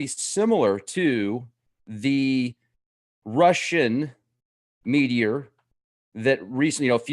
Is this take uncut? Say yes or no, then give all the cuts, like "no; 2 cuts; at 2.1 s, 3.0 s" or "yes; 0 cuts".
no; 1 cut; at 3.8 s